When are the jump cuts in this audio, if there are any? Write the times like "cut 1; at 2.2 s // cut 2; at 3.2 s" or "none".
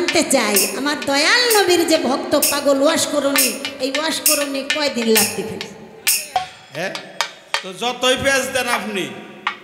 cut 1; at 6.4 s